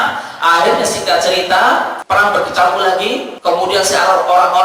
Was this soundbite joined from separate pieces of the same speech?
yes; 2 cuts; at 2.0 s, 3.3 s

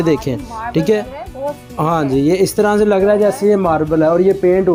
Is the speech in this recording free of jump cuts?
yes; 0 cuts

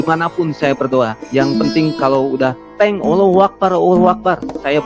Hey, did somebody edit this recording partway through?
no; 0 cuts

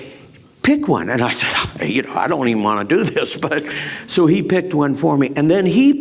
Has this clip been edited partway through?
no; 0 cuts

